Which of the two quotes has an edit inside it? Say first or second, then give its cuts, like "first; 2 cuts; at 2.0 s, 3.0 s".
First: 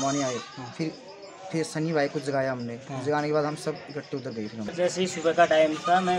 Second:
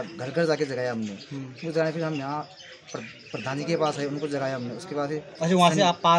first; 1 cut; at 4.7 s